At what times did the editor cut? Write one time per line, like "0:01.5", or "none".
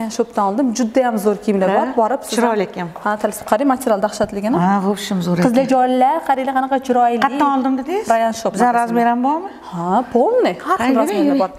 none